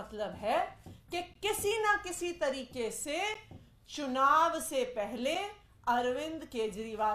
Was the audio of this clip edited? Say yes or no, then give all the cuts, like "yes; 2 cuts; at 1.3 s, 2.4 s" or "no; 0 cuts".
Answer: no; 0 cuts